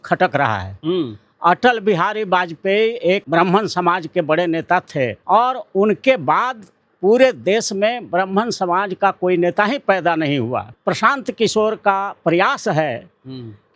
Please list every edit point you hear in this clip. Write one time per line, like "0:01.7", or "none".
0:03.2
0:05.2
0:10.7